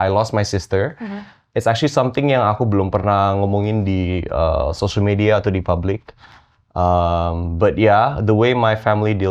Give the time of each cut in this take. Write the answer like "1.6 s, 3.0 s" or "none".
none